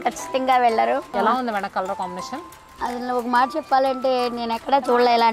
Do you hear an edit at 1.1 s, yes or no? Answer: yes